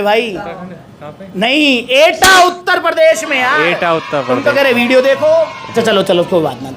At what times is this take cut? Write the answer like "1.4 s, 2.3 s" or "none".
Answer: 5.7 s